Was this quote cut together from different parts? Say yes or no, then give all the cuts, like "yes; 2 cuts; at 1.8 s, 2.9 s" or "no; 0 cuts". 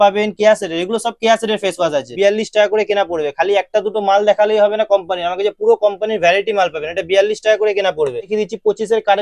yes; 2 cuts; at 2.1 s, 8.3 s